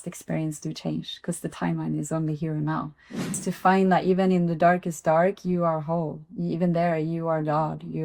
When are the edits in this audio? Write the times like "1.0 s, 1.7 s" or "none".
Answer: 3.5 s